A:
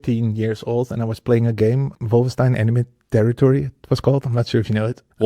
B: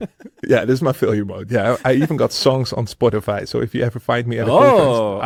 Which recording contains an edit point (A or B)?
A